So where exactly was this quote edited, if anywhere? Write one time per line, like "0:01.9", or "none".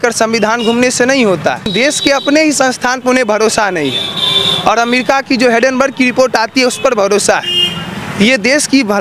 0:01.7